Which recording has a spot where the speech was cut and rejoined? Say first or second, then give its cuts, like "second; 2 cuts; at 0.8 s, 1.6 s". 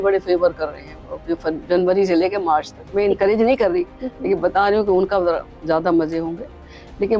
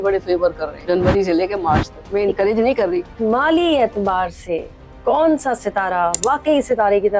second; 2 cuts; at 0.8 s, 3.1 s